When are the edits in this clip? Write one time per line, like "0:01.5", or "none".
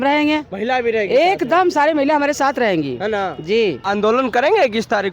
0:03.8